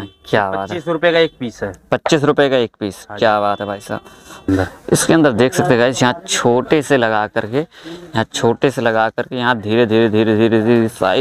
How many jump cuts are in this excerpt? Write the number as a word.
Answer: one